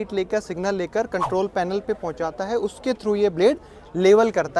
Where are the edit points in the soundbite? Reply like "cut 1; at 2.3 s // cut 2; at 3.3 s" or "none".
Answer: none